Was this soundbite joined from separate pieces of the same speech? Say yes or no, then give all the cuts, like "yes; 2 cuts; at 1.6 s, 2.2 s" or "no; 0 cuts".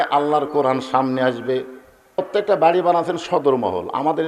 yes; 1 cut; at 2.2 s